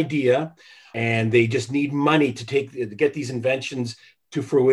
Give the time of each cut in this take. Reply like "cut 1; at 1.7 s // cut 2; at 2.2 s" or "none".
cut 1; at 0.9 s